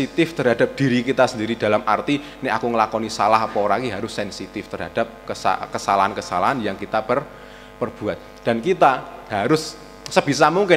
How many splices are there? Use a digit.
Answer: 0